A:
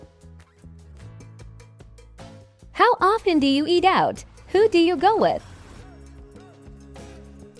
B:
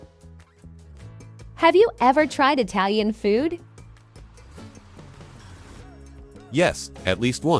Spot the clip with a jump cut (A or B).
B